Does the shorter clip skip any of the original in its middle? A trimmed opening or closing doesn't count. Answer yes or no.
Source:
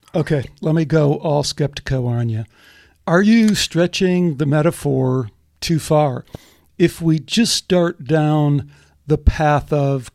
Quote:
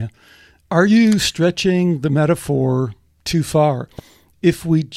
no